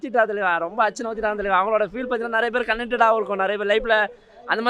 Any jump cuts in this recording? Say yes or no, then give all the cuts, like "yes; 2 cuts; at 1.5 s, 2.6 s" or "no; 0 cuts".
no; 0 cuts